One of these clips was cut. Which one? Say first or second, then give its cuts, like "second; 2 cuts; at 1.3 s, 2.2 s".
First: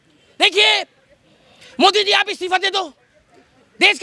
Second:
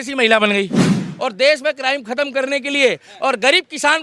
second; 1 cut; at 1.0 s